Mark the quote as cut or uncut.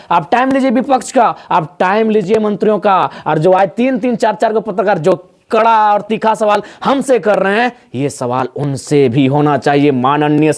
uncut